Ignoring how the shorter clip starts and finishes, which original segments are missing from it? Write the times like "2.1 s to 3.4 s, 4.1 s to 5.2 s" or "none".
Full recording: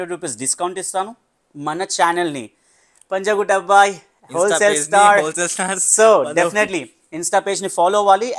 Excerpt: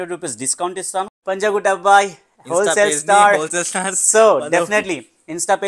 1.1 s to 3.0 s